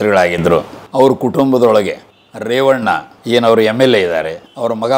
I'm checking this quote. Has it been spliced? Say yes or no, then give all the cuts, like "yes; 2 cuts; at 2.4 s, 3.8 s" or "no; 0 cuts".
no; 0 cuts